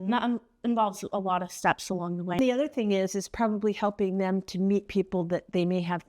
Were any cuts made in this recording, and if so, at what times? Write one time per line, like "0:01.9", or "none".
0:02.4